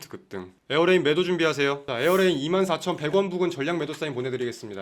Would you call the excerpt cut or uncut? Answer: cut